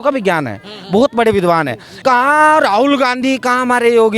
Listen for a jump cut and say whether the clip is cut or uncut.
cut